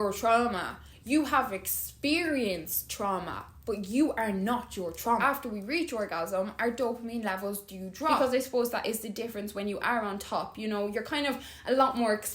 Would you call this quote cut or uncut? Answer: cut